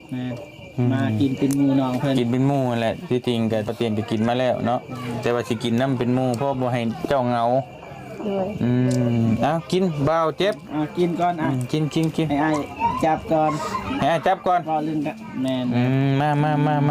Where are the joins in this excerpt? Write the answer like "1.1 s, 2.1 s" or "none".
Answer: none